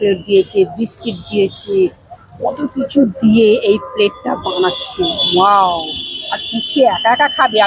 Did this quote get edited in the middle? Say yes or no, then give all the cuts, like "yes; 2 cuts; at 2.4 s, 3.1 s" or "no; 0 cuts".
no; 0 cuts